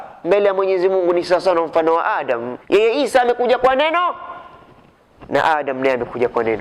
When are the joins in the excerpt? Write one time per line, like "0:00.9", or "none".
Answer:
0:02.5